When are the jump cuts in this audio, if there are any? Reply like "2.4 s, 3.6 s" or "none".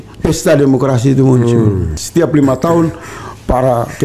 2.0 s